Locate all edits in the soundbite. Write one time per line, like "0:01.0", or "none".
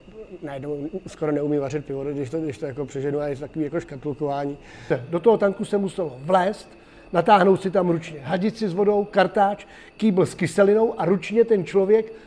0:04.9